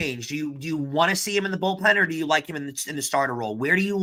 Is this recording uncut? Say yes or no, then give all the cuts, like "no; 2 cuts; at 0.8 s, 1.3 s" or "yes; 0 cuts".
yes; 0 cuts